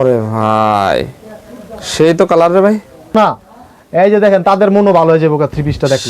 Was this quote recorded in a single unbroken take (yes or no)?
no